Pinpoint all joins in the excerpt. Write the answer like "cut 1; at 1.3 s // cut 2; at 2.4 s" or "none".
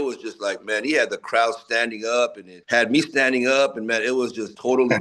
none